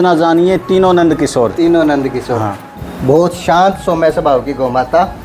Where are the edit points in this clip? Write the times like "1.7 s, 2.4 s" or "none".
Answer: 2.6 s